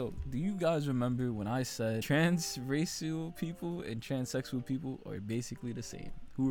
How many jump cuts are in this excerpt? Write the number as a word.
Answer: one